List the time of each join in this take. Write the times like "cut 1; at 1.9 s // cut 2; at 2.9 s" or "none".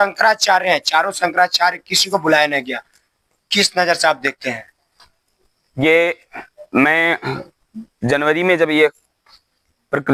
none